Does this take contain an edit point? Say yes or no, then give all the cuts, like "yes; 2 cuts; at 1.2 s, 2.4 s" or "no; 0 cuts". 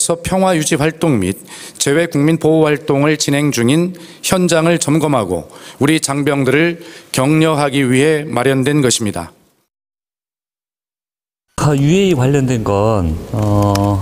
no; 0 cuts